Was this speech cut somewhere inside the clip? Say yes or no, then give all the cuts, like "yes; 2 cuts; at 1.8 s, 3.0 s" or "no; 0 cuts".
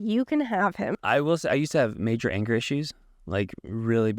yes; 1 cut; at 0.9 s